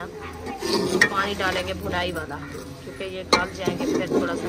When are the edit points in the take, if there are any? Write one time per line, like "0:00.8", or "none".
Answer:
none